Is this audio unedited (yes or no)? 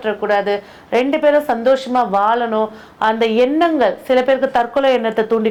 yes